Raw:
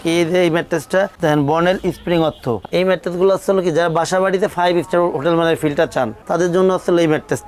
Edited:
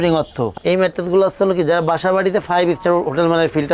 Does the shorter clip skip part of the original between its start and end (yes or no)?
no